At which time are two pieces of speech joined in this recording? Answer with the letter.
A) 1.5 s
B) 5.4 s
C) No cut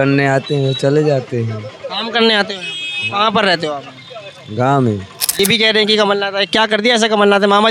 B